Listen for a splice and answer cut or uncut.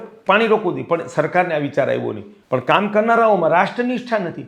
cut